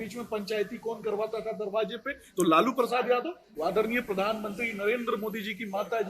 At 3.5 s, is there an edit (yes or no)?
yes